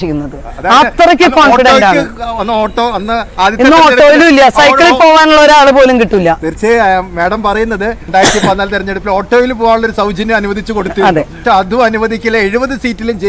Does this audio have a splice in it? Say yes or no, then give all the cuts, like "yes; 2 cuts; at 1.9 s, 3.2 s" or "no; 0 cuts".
yes; 2 cuts; at 8.0 s, 11.4 s